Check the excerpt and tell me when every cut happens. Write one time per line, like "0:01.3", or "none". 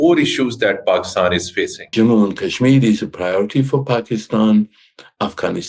0:01.9